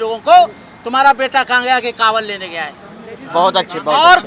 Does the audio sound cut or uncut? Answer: uncut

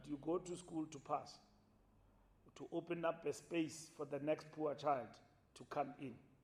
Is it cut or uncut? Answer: uncut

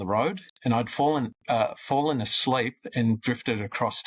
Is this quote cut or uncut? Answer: uncut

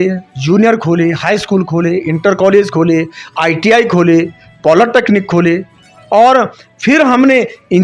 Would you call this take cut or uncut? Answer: uncut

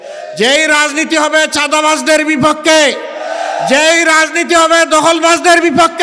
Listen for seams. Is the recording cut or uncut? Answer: uncut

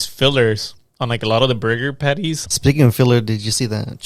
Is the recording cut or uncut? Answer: cut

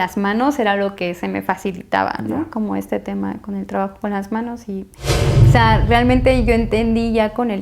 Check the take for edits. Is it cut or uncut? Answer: cut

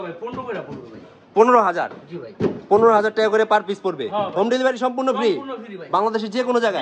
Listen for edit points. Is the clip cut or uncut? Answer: uncut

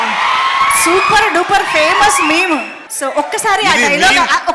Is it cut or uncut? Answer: cut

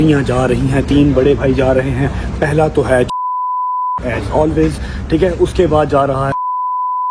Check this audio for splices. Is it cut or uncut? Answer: uncut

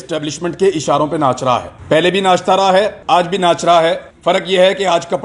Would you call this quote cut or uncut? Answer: cut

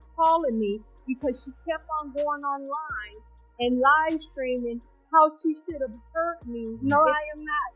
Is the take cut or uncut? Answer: cut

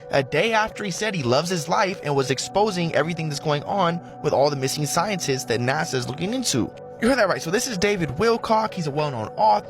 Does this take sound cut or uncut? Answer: uncut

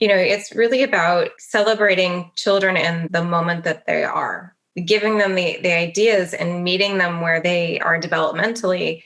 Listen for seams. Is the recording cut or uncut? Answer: cut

